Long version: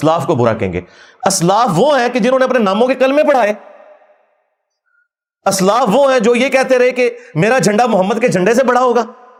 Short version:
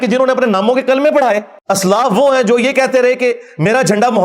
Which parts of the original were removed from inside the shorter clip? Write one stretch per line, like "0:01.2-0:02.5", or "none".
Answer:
0:03.7-0:05.3